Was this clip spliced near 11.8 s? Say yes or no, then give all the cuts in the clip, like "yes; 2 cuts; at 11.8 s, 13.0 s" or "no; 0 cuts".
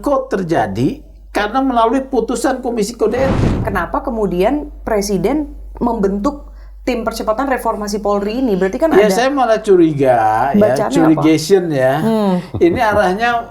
no; 1 cut; at 3.6 s